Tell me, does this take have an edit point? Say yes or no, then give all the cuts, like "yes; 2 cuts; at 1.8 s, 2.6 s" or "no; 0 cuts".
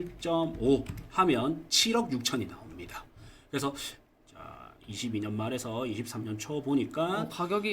yes; 1 cut; at 4.0 s